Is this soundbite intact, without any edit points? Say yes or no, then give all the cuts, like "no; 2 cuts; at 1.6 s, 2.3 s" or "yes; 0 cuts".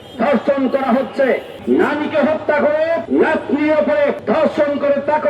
no; 3 cuts; at 1.5 s, 3.0 s, 4.2 s